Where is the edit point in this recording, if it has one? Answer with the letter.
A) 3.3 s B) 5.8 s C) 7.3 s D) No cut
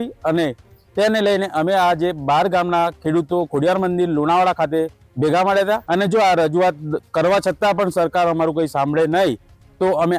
B